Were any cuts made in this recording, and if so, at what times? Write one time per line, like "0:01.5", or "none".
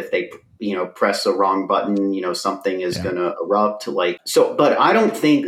0:04.2